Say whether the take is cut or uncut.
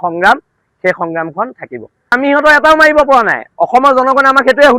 cut